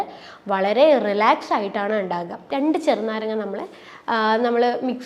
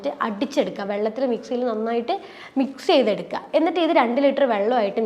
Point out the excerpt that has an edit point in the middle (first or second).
first